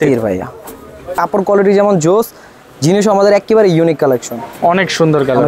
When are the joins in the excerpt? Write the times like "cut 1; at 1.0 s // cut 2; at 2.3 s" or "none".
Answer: cut 1; at 1.1 s // cut 2; at 4.5 s

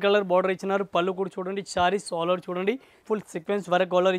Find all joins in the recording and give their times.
cut 1; at 3.0 s

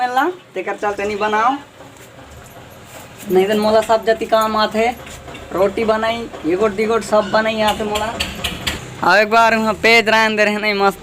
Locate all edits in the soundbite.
cut 1; at 8.9 s

